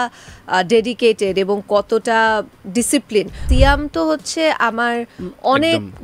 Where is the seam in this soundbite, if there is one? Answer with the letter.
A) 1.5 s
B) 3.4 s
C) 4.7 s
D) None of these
B